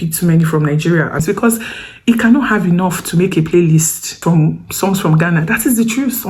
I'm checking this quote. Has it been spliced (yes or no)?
yes